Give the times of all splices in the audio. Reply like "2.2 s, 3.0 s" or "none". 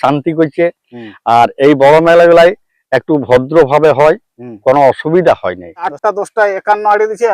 5.9 s